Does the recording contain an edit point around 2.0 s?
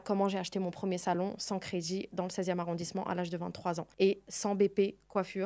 no; 1 cut; at 3.9 s

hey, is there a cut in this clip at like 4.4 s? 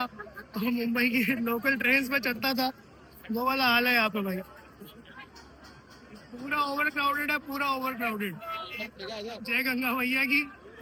no; 0 cuts

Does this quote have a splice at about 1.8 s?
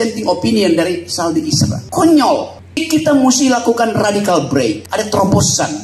yes; 3 cuts; at 1.8 s, 2.5 s, 4.8 s

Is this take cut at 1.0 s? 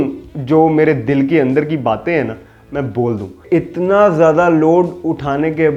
no; 1 cut; at 3.4 s

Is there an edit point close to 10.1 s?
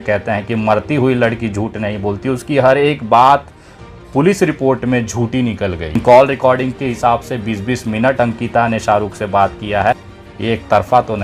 yes; 2 cuts; at 5.9 s, 10.1 s

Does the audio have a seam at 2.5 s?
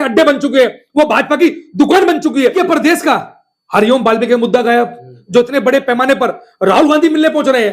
yes; 1 cut; at 2.5 s

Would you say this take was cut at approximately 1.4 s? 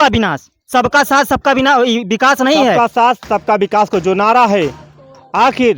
no; 1 cut; at 2.8 s

